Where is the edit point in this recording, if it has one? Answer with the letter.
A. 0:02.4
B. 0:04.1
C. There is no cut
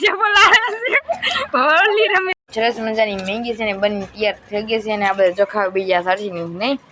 A